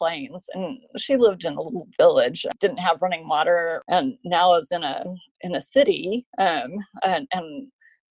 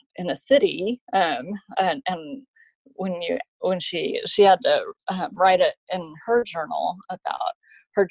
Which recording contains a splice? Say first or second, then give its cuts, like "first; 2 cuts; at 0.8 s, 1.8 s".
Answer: first; 2 cuts; at 2.4 s, 3.8 s